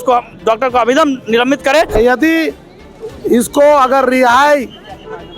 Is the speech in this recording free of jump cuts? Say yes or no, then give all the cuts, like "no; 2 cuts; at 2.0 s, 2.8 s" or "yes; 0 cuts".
no; 1 cut; at 2.0 s